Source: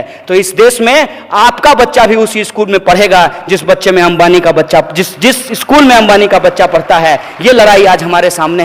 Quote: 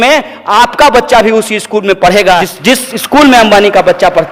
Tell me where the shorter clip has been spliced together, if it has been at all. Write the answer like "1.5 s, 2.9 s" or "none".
2.5 s